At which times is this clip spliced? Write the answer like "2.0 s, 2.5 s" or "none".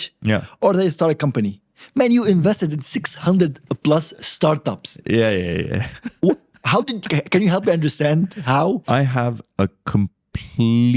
8.8 s